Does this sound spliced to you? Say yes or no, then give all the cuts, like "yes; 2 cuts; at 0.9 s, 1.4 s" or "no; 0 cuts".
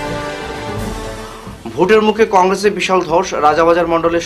yes; 1 cut; at 1.0 s